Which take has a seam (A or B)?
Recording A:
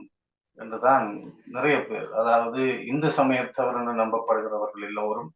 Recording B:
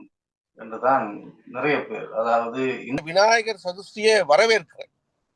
B